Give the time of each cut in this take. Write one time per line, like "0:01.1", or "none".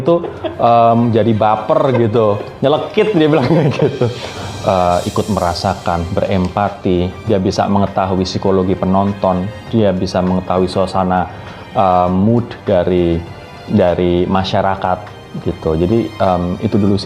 0:04.3